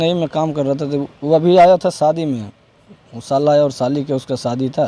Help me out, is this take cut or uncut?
uncut